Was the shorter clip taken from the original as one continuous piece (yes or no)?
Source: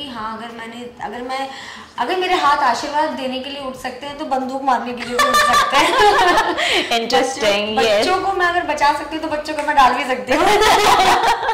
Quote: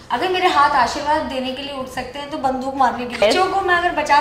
no